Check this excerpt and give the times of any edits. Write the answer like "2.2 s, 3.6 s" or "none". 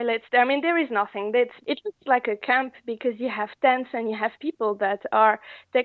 1.6 s